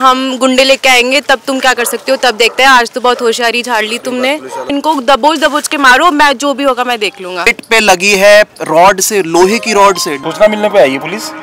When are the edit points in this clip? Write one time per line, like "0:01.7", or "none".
0:04.7
0:07.6
0:10.1